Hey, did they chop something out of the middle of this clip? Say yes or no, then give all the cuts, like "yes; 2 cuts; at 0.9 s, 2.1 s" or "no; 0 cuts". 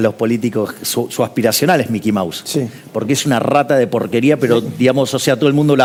no; 0 cuts